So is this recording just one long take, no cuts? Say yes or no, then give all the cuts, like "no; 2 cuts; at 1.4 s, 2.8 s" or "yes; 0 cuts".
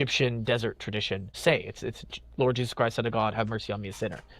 no; 1 cut; at 1.4 s